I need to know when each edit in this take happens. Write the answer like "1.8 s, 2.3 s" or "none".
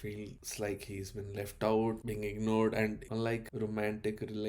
3.1 s